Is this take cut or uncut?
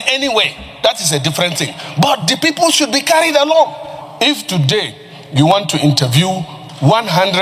cut